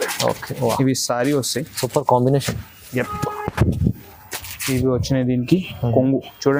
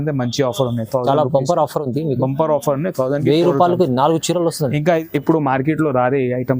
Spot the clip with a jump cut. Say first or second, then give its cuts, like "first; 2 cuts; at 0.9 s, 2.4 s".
second; 1 cut; at 5.0 s